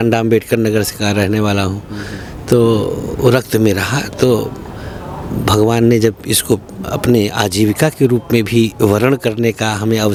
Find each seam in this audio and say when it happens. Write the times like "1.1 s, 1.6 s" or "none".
none